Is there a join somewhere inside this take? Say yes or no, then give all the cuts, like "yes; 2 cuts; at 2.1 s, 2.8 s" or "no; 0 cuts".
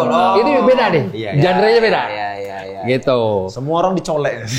no; 0 cuts